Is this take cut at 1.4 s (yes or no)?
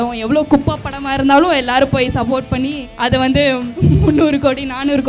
no